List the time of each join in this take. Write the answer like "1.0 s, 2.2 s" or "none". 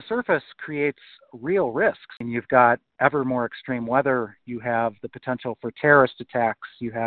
2.2 s